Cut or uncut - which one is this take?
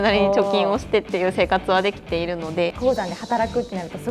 cut